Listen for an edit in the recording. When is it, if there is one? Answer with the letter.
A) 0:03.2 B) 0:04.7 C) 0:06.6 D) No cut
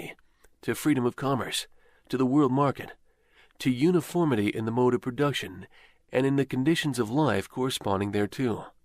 C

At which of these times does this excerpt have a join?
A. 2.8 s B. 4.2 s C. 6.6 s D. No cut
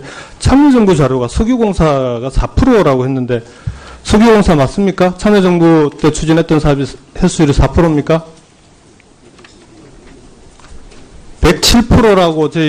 C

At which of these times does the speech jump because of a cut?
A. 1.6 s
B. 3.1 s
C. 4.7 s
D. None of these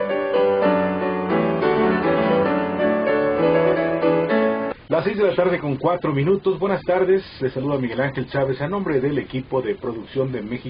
C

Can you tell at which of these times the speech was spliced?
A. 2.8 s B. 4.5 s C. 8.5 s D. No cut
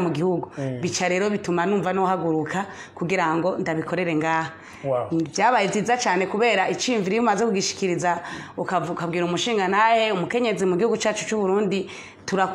D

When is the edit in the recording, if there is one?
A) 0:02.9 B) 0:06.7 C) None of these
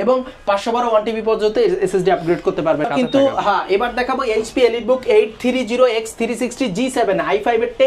A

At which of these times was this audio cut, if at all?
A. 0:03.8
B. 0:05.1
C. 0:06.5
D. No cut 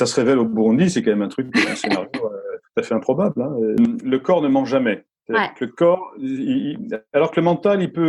A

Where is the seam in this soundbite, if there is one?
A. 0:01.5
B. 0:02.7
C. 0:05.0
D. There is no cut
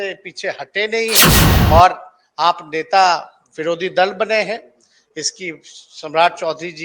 A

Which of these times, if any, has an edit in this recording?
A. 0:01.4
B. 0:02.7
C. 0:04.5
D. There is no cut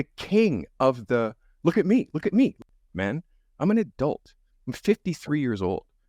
B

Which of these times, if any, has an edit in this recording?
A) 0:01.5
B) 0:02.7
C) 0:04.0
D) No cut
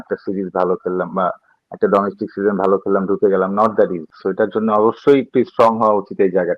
C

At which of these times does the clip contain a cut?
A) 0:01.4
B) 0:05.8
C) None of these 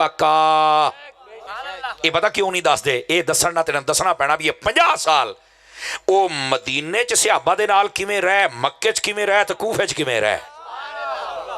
A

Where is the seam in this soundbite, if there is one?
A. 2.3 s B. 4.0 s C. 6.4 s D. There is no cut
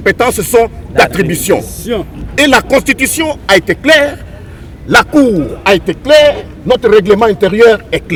D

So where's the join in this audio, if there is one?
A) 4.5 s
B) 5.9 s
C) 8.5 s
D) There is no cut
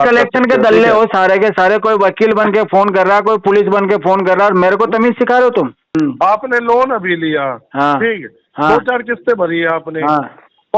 B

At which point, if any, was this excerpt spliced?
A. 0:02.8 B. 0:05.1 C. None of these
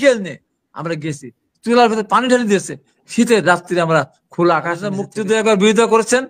B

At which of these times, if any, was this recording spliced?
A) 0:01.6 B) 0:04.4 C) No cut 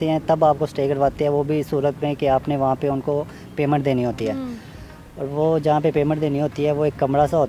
C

